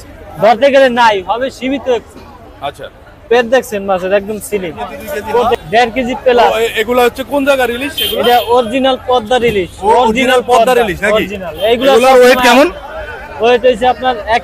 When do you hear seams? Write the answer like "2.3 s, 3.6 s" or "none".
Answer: 5.5 s